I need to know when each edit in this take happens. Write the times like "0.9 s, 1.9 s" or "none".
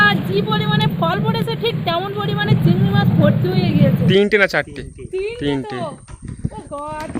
4.1 s